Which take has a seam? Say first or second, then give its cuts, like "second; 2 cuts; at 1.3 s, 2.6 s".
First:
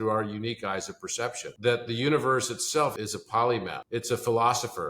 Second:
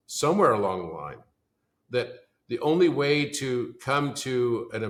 first; 3 cuts; at 1.5 s, 2.9 s, 3.8 s